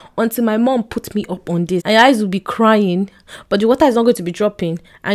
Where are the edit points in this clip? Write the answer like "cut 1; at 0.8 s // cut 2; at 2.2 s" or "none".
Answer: cut 1; at 1.8 s